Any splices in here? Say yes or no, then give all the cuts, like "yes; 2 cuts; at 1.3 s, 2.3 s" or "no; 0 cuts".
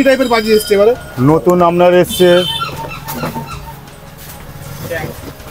no; 0 cuts